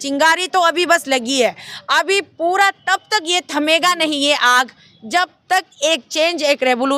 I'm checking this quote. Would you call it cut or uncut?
uncut